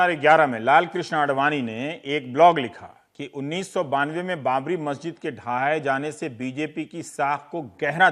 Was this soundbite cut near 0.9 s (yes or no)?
no